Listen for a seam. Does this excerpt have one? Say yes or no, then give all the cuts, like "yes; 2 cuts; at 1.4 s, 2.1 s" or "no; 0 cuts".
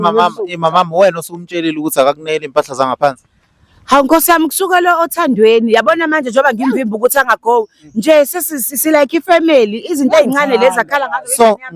no; 0 cuts